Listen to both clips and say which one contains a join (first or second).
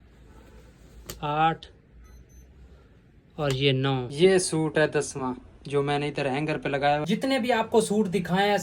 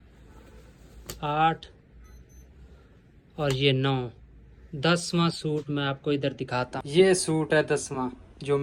first